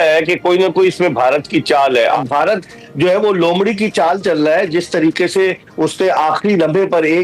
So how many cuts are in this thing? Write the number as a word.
one